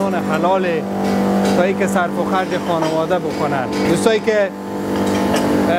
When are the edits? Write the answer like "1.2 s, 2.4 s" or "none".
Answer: none